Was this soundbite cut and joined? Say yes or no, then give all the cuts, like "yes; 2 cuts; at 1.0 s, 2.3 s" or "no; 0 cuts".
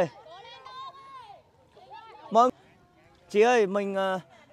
yes; 1 cut; at 2.5 s